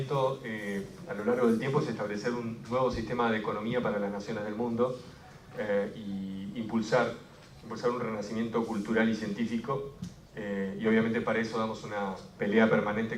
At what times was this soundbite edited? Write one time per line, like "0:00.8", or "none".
none

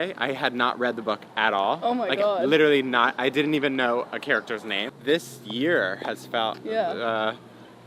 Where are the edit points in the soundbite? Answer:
0:04.8

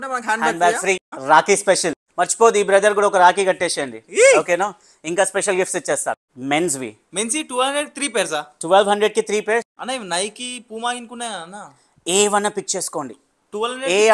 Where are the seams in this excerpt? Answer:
0:01.1
0:02.0
0:06.3
0:09.8

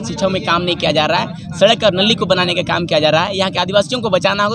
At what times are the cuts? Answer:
none

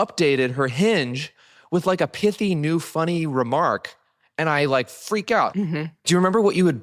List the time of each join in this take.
0:05.9

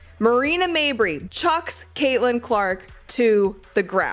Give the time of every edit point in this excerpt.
0:01.2

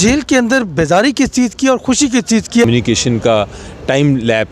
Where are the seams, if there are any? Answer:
0:02.7

